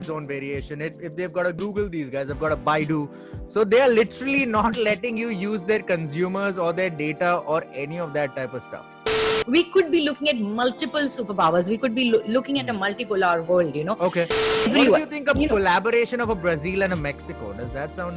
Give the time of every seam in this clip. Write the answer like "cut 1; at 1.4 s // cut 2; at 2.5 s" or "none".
cut 1; at 9.3 s // cut 2; at 14.4 s

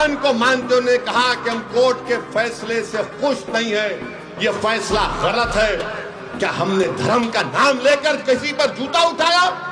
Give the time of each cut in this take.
none

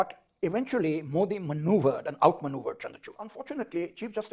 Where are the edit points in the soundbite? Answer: cut 1; at 3.4 s

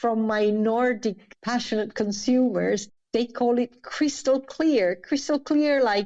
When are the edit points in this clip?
cut 1; at 1.2 s // cut 2; at 2.8 s

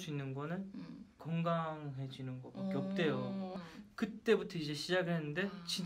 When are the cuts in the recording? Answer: none

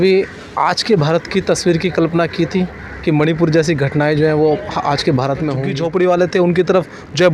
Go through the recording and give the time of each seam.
cut 1; at 5.7 s

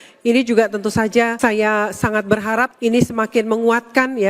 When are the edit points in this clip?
cut 1; at 1.4 s // cut 2; at 2.7 s

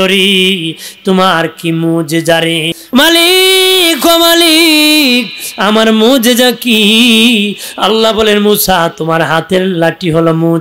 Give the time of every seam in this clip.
cut 1; at 2.8 s

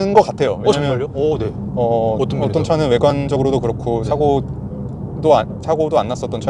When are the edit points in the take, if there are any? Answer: none

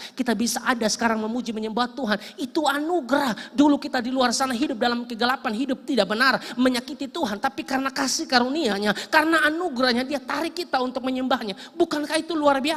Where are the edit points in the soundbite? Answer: none

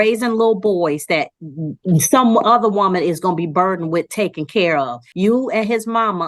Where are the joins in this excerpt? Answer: cut 1; at 5.0 s

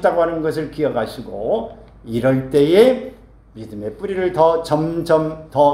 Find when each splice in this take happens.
none

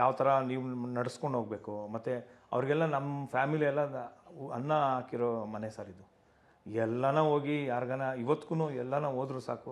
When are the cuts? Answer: none

